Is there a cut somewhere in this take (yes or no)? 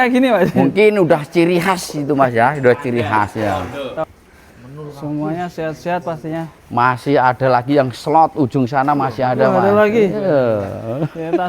yes